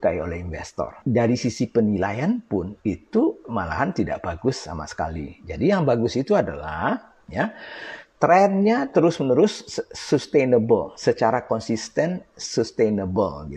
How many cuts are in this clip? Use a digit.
1